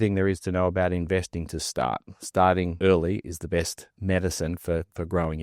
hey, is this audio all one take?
no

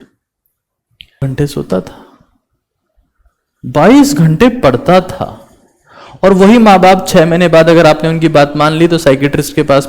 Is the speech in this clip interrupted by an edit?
yes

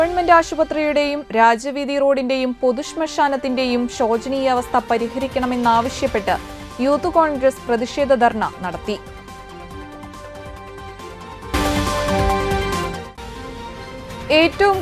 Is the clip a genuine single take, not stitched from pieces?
yes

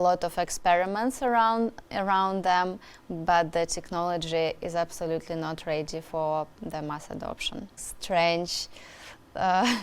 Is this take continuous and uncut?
no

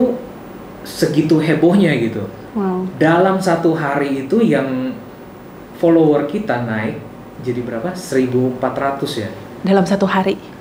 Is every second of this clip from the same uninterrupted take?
yes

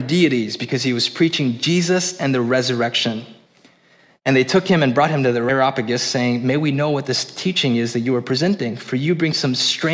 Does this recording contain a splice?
yes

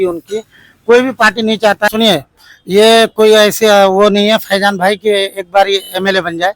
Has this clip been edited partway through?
yes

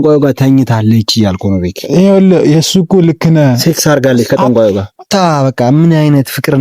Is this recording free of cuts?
no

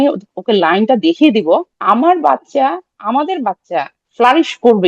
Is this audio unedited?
no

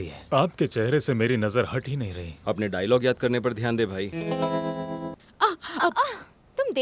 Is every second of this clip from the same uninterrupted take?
no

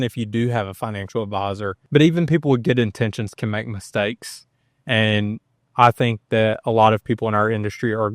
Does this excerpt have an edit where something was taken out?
yes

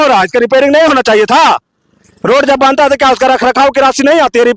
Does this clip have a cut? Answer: no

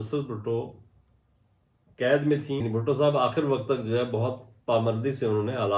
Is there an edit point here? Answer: yes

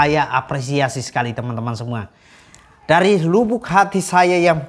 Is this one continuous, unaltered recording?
yes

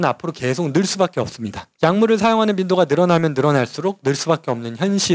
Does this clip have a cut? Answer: no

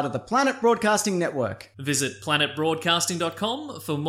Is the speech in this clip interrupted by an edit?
no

